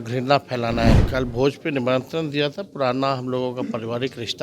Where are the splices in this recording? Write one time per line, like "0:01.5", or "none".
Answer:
0:01.0